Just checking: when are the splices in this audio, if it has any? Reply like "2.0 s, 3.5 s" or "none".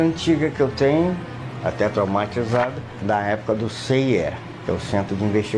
3.0 s, 4.5 s